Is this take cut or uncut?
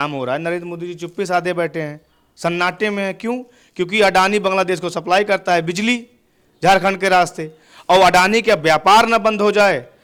uncut